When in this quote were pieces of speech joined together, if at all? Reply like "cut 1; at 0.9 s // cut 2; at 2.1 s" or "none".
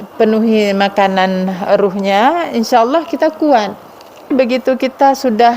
cut 1; at 4.3 s